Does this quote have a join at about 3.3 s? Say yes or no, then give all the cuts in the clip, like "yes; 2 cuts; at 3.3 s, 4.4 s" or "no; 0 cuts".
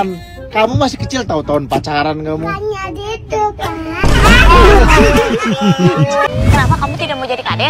no; 1 cut; at 6.3 s